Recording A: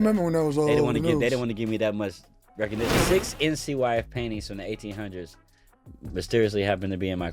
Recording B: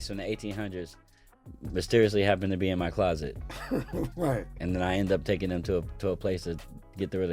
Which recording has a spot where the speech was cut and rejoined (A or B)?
A